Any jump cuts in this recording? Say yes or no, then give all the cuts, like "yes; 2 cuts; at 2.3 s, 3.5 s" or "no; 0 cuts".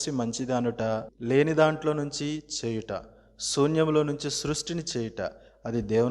yes; 1 cut; at 1.0 s